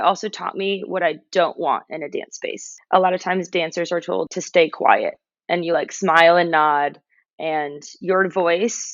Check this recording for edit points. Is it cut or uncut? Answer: cut